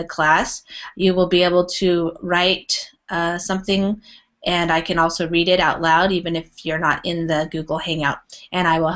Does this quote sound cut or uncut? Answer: cut